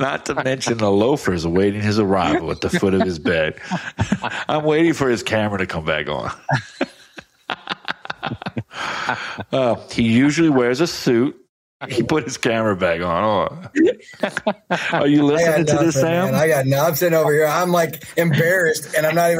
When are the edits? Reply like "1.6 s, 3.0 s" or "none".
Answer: 11.9 s